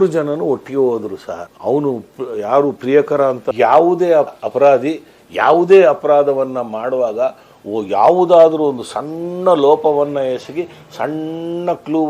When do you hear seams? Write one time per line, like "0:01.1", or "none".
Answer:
0:03.4